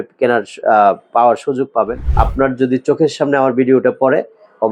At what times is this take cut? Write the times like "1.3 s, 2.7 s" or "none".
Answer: 2.0 s